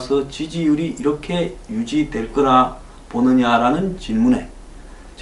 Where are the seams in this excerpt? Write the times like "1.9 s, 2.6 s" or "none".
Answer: 3.6 s